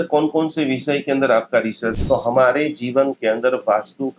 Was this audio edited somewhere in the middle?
yes; 1 cut; at 2.0 s

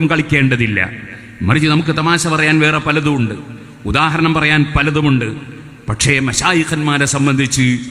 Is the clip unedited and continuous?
yes; 0 cuts

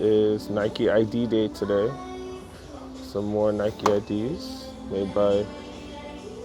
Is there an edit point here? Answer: no; 0 cuts

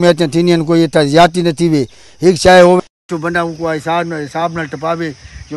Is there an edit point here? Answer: no; 0 cuts

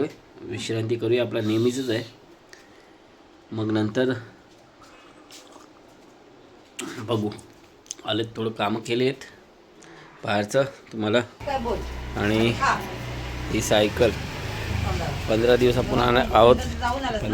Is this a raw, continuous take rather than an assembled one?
no; 1 cut; at 11.4 s

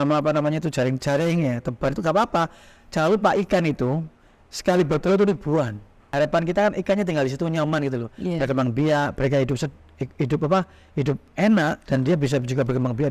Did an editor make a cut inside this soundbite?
yes; 1 cut; at 6.0 s

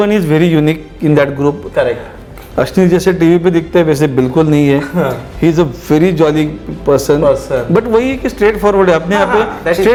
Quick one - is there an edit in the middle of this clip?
no; 0 cuts

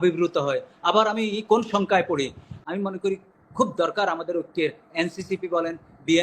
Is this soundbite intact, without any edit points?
no; 1 cut; at 2.5 s

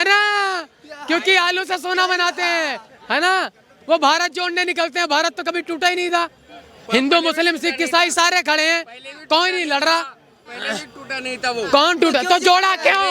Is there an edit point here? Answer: no; 0 cuts

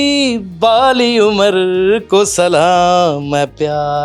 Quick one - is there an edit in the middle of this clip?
no; 0 cuts

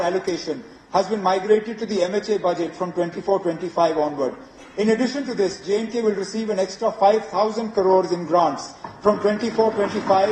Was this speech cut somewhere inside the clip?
no; 0 cuts

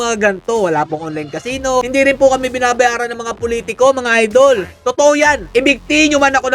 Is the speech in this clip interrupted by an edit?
yes; 1 cut; at 1.8 s

